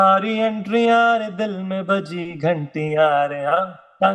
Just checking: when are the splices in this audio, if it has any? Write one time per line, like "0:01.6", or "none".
none